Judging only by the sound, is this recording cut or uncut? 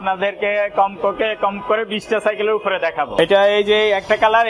cut